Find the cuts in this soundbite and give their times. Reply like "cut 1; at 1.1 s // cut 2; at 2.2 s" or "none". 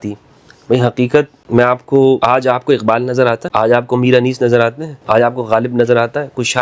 cut 1; at 1.4 s // cut 2; at 2.2 s // cut 3; at 3.4 s // cut 4; at 4.9 s